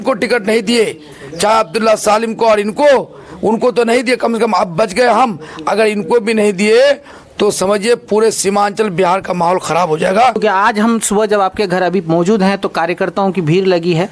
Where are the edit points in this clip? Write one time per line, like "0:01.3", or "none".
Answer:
0:10.4

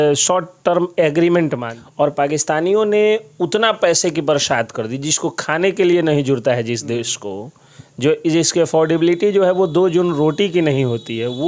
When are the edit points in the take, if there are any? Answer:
0:01.7

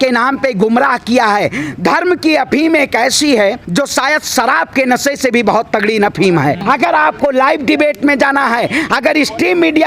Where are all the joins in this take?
0:03.6
0:06.6

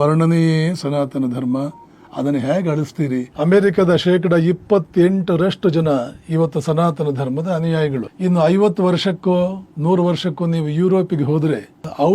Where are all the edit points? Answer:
0:03.3
0:08.1
0:09.7

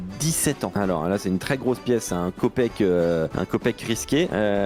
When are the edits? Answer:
none

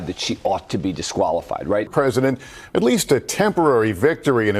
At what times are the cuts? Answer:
0:01.9

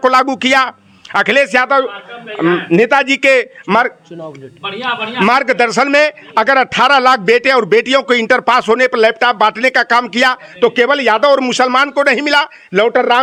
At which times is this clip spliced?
none

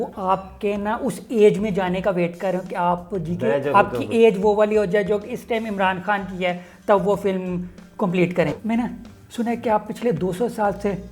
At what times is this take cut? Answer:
0:08.6

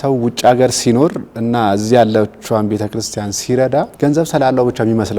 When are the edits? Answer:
0:03.9

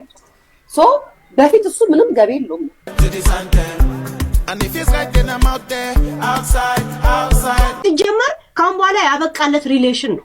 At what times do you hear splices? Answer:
0:02.8

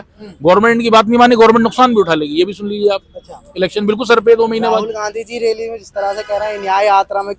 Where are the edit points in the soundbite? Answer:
none

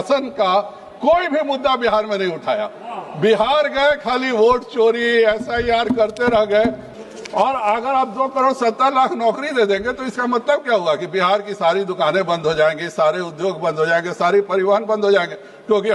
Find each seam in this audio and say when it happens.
0:06.8

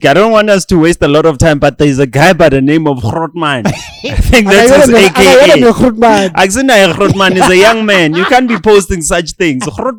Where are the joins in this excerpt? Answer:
none

